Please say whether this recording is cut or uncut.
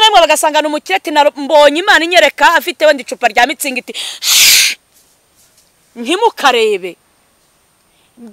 uncut